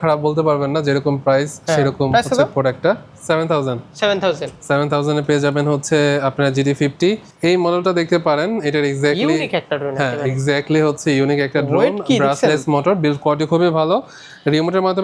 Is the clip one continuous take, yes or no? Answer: yes